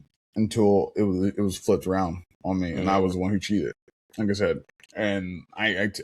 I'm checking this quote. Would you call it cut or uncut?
uncut